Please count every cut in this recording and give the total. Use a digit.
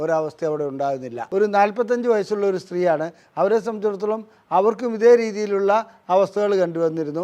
1